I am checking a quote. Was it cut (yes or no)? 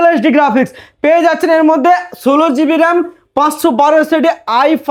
no